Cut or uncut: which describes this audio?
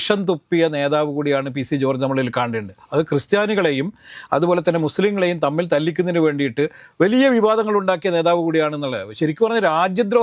uncut